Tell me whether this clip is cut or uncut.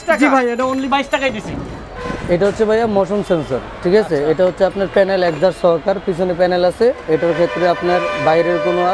cut